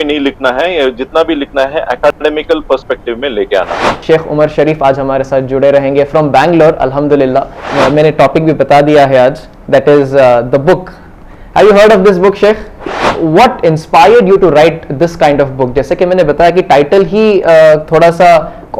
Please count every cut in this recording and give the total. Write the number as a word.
three